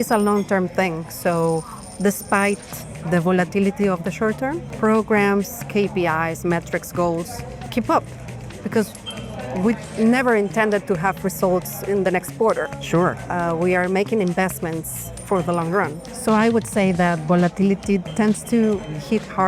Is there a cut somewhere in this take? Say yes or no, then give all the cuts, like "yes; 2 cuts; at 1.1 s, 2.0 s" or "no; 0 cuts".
yes; 4 cuts; at 4.7 s, 7.7 s, 16.1 s, 18.1 s